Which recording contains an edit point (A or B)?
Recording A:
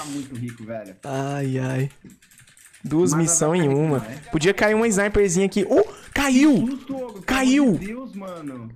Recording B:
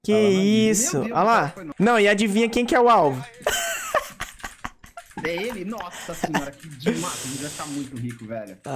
B